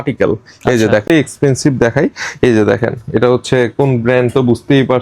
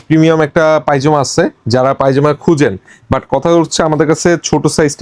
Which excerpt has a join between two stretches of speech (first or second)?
first